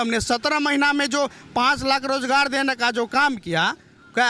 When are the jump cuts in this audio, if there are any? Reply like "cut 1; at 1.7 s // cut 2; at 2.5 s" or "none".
none